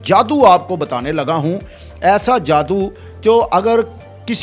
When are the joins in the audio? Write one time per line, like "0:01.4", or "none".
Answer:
none